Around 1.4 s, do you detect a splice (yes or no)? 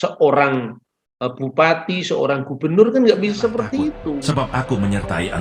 no